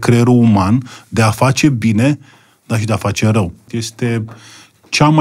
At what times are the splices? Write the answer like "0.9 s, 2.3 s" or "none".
3.6 s